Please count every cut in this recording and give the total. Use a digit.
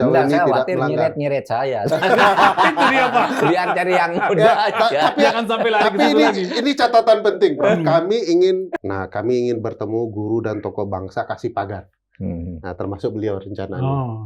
1